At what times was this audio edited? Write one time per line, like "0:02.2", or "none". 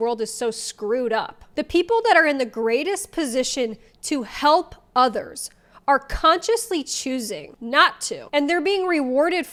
none